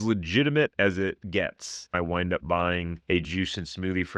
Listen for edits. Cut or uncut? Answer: cut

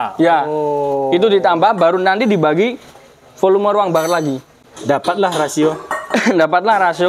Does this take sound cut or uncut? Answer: uncut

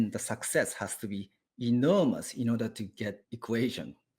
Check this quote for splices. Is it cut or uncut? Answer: cut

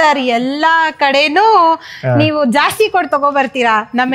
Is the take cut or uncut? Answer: uncut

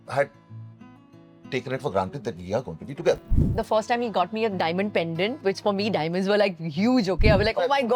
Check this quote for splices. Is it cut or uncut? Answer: cut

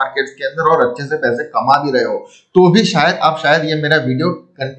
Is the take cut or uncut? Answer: uncut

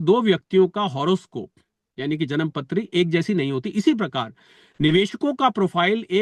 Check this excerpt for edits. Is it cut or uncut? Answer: uncut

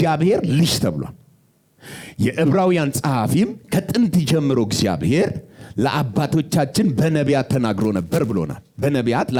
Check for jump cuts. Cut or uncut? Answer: uncut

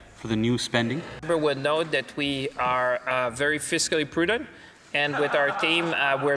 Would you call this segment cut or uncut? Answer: cut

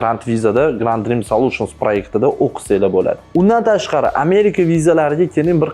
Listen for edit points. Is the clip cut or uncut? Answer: uncut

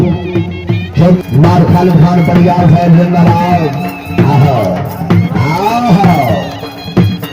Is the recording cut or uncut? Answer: cut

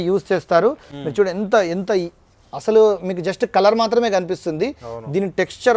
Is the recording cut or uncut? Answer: uncut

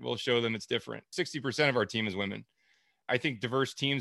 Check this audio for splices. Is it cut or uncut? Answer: cut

